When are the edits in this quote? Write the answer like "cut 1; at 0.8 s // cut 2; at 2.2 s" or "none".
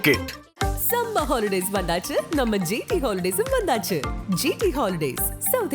none